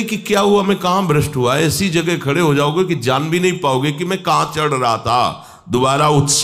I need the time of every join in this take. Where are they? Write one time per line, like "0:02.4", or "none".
none